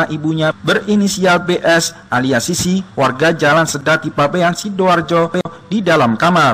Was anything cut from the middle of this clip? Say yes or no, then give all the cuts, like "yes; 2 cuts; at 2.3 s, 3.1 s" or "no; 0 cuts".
no; 0 cuts